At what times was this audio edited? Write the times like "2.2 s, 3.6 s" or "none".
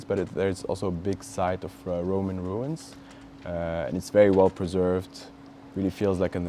none